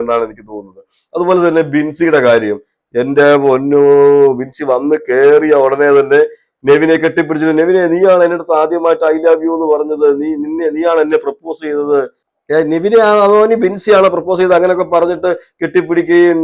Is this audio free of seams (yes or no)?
yes